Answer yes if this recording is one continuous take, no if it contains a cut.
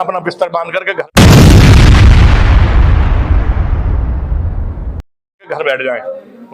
no